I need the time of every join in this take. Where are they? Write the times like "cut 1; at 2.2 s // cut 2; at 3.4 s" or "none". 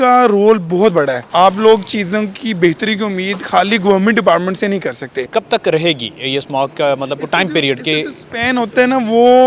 cut 1; at 1.2 s // cut 2; at 5.1 s